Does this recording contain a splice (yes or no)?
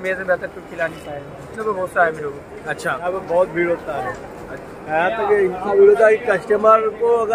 yes